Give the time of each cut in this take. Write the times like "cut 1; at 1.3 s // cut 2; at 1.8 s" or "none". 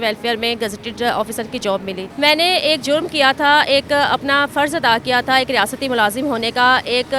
none